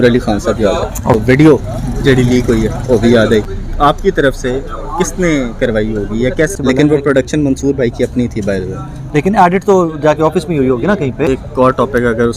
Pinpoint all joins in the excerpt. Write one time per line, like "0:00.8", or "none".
0:01.0
0:03.5
0:06.5
0:11.3